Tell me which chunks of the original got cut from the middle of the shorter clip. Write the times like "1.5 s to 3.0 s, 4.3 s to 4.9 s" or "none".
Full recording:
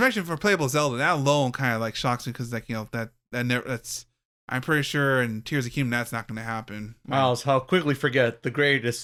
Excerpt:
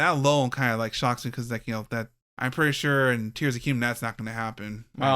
3.2 s to 4.3 s